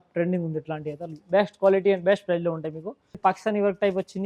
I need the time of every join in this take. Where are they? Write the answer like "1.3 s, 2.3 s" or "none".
3.2 s

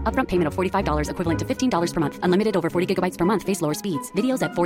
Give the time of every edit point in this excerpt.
none

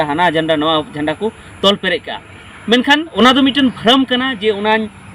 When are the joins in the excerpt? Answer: 3.1 s

